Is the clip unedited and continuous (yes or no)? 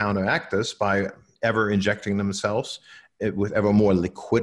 no